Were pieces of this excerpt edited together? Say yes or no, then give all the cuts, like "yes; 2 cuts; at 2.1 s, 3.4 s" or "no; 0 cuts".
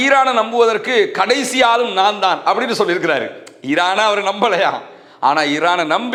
no; 0 cuts